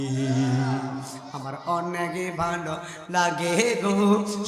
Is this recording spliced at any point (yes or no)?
yes